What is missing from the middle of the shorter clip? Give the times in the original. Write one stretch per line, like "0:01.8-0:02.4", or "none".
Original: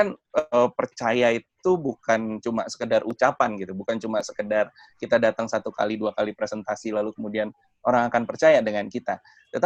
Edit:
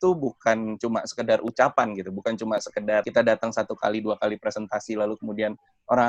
0:04.7-0:05.0